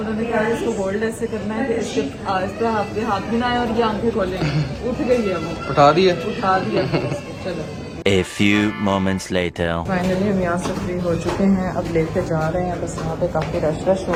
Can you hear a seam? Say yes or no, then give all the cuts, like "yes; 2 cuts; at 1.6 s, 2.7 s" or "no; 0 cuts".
no; 0 cuts